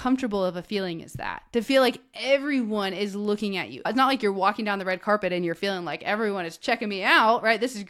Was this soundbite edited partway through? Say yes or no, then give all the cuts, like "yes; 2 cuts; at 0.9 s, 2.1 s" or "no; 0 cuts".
yes; 1 cut; at 3.9 s